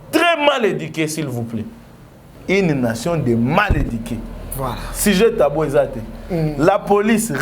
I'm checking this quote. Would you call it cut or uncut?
cut